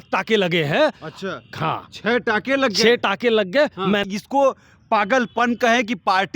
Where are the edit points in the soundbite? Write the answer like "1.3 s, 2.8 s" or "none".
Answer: 4.0 s